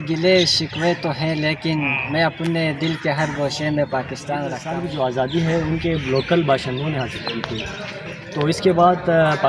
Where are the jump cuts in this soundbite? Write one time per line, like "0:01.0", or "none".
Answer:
0:04.6